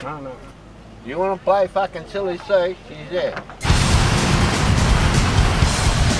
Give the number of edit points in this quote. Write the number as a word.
one